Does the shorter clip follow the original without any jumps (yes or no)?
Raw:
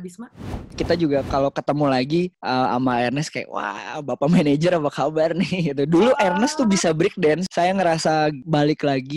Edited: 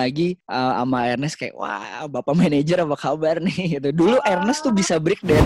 yes